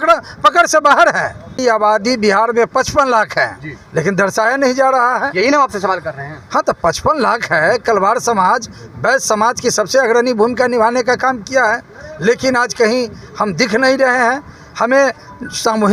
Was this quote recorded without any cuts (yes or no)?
no